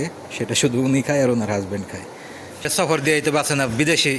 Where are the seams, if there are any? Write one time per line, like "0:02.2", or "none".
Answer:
0:02.7